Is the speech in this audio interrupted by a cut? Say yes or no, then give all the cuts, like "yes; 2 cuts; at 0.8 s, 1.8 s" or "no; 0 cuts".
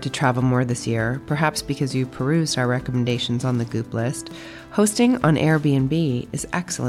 no; 0 cuts